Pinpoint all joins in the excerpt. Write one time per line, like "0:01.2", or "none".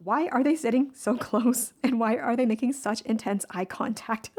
none